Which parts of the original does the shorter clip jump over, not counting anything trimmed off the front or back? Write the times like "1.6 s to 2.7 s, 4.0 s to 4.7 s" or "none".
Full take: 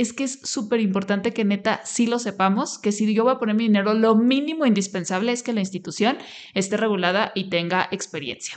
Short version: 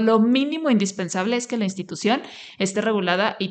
none

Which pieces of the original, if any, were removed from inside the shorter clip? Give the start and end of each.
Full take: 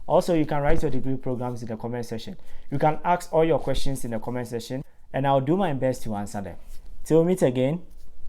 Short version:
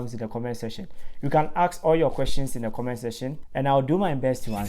4.9 s to 5.0 s

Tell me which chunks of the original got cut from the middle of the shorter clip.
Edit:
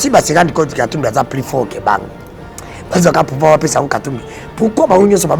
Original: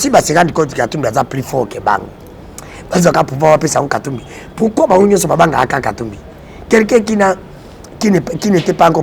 none

